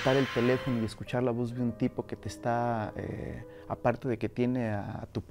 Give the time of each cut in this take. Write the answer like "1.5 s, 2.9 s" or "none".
none